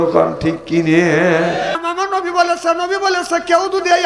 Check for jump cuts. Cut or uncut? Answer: cut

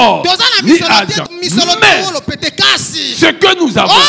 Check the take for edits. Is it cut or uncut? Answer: cut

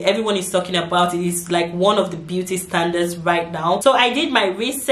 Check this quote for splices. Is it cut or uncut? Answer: cut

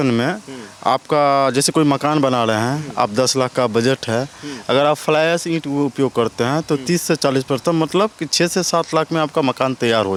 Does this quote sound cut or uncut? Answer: uncut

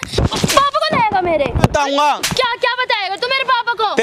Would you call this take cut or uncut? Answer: cut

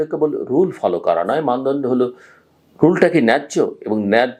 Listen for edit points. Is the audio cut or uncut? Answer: uncut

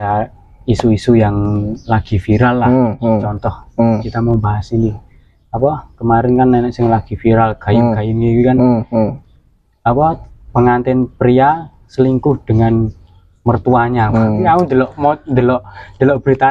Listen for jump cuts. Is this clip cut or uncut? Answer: uncut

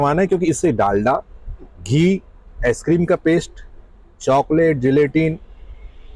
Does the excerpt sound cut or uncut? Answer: uncut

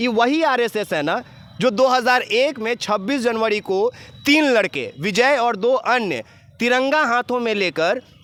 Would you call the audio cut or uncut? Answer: uncut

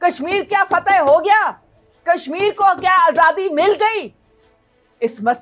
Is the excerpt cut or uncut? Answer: uncut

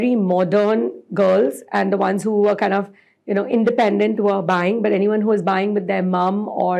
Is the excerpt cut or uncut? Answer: uncut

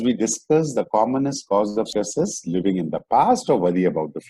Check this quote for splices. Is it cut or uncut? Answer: uncut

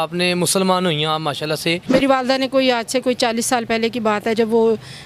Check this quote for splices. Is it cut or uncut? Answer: cut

